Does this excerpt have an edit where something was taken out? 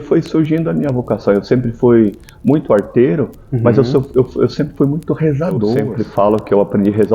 yes; 1 cut; at 5.9 s

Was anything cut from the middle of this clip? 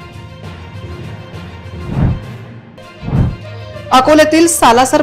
yes; 1 cut; at 1.6 s

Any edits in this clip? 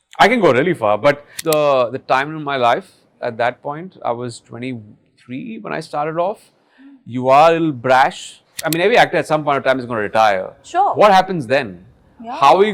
yes; 2 cuts; at 1.3 s, 8.6 s

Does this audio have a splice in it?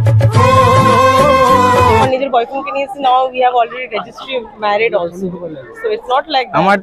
yes; 1 cut; at 2.0 s

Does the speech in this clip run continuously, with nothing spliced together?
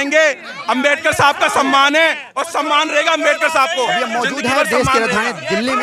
yes; 0 cuts

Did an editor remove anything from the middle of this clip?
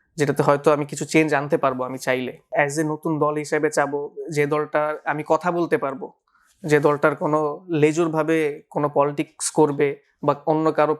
yes; 1 cut; at 2.5 s

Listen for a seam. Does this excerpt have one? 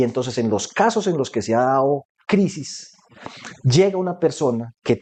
no; 0 cuts

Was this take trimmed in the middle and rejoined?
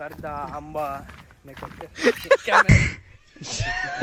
no; 0 cuts

